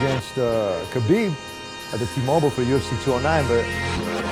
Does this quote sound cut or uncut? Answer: uncut